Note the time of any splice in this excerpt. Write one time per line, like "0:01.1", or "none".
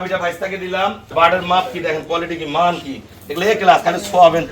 0:01.1